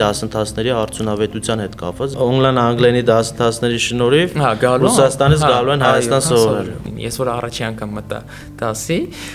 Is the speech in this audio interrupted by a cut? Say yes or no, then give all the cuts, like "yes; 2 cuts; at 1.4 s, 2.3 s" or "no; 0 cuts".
yes; 2 cuts; at 2.1 s, 6.8 s